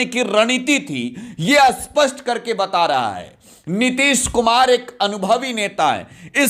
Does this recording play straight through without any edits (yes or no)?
yes